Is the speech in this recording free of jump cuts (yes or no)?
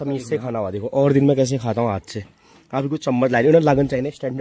yes